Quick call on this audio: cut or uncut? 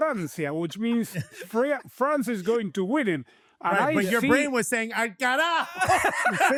uncut